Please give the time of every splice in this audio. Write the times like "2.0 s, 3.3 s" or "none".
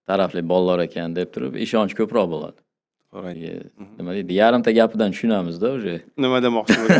3.4 s